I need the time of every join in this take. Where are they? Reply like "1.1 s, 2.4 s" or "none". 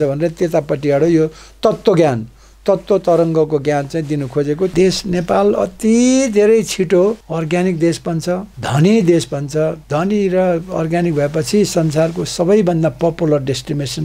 4.7 s, 7.3 s, 8.6 s, 9.8 s